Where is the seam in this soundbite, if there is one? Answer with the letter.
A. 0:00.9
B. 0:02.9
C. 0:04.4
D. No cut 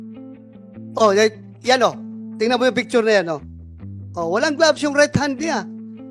A